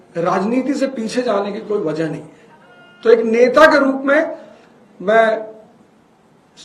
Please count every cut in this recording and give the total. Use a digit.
0